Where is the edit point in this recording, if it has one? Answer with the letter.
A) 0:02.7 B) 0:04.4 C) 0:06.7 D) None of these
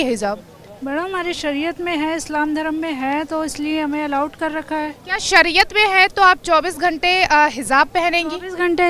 D